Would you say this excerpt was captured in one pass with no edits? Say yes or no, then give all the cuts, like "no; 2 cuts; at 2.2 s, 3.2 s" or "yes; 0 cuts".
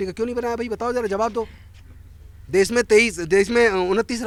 yes; 0 cuts